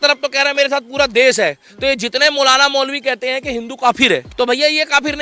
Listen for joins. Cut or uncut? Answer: cut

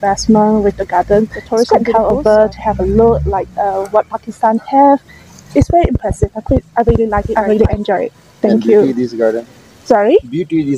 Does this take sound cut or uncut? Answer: cut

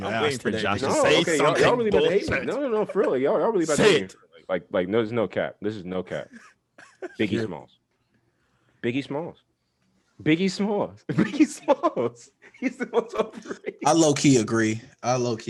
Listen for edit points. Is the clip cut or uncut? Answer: uncut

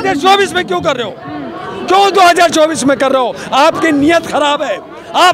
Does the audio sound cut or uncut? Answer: uncut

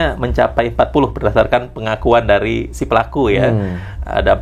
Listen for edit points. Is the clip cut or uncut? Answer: uncut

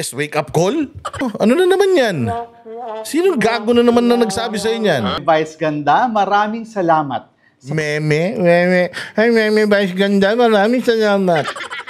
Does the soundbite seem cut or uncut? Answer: cut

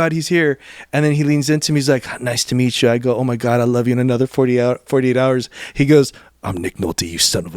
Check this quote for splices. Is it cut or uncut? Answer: uncut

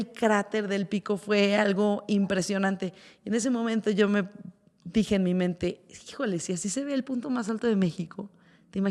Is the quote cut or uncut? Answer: uncut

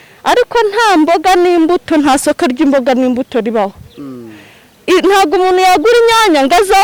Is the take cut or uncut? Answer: uncut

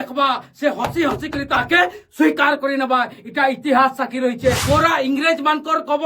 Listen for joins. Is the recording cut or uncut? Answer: cut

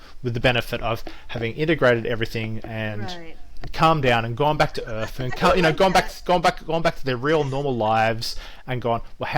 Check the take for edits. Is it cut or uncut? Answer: uncut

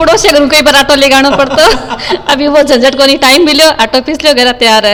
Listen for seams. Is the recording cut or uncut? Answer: uncut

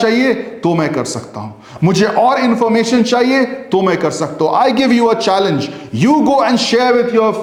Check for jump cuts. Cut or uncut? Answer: uncut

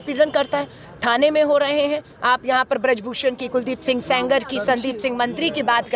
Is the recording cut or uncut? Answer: uncut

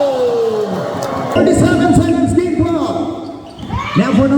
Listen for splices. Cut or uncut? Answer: cut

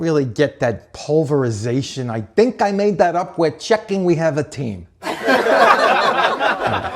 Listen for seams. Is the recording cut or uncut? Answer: uncut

